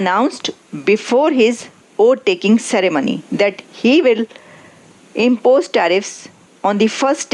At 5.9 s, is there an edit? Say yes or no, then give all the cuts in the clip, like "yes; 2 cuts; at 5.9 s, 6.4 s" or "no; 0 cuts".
no; 0 cuts